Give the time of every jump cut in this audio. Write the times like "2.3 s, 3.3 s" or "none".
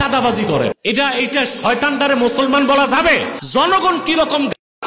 0.8 s, 3.4 s